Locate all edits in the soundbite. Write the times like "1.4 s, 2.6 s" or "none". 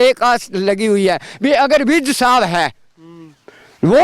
none